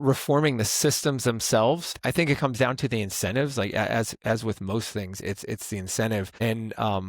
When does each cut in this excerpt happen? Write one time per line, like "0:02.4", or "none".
0:02.0
0:06.3